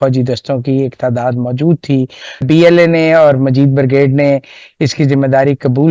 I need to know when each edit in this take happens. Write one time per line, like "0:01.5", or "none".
0:02.4